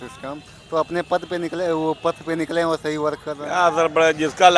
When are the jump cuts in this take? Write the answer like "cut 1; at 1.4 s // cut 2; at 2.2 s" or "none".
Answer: cut 1; at 3.3 s